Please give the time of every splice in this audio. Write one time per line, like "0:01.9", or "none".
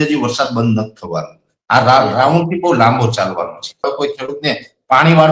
0:03.8

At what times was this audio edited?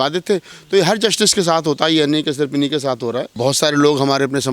0:03.4

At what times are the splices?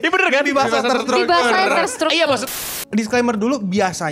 0:02.5

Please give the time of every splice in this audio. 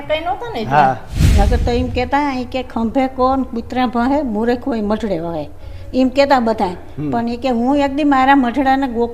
0:01.2

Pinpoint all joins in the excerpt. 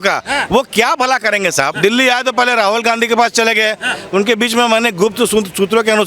0:01.7

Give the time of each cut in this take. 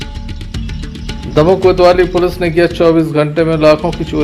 none

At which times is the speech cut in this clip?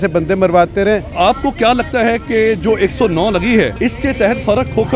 0:01.1
0:03.7

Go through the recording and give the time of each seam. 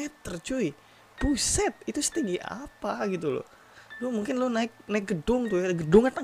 none

